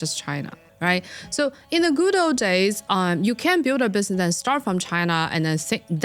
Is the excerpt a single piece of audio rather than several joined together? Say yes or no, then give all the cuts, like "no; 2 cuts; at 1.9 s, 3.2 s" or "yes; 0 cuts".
yes; 0 cuts